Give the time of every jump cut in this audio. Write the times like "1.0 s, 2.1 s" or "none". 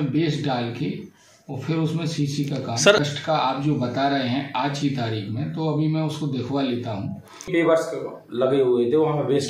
3.0 s, 7.5 s